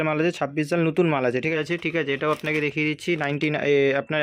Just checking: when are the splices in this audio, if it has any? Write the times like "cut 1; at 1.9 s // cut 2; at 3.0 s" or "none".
cut 1; at 1.6 s